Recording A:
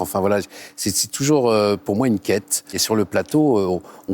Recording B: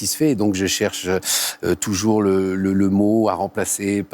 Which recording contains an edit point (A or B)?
A